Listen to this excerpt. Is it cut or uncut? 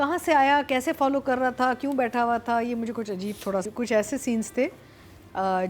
cut